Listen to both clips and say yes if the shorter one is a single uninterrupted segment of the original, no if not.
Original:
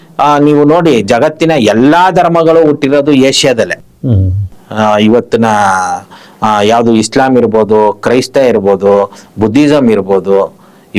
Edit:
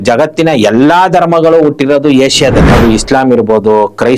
no